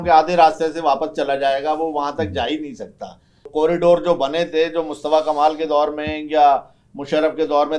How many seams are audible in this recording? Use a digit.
1